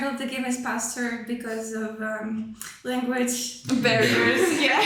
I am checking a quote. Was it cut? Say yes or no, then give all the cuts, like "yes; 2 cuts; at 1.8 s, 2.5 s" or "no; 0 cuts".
no; 0 cuts